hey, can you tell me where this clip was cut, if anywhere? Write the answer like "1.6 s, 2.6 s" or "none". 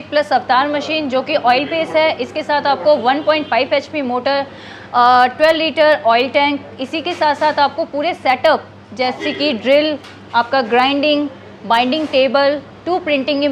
none